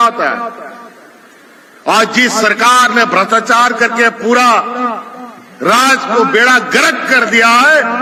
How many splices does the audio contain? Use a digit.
0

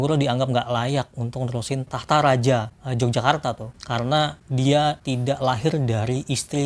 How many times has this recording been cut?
0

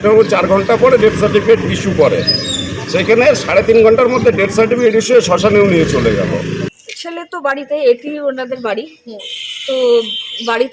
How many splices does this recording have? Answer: 1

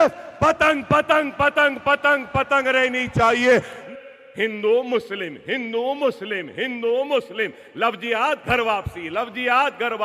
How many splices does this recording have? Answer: 1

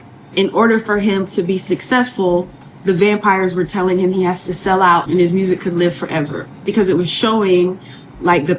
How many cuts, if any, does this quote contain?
2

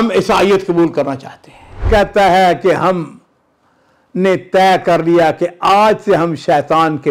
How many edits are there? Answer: 1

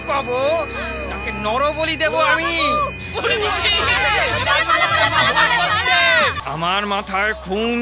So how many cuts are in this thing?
1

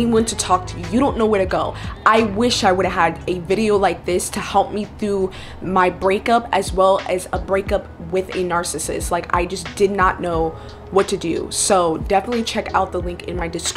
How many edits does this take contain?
0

